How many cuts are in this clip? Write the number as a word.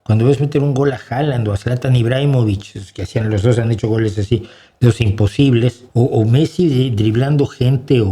one